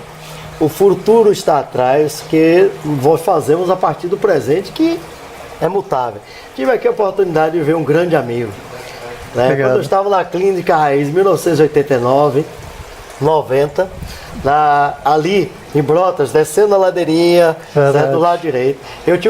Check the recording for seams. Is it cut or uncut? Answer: cut